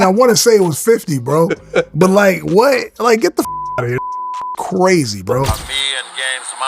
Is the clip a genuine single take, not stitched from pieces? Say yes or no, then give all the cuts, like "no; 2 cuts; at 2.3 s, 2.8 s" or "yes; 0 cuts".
no; 1 cut; at 5.5 s